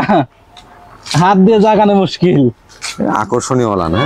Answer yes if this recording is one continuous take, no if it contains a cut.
yes